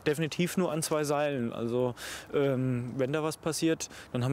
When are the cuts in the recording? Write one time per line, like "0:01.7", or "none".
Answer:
none